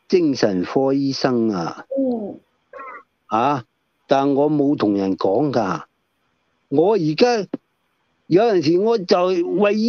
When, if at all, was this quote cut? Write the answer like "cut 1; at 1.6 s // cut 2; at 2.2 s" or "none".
none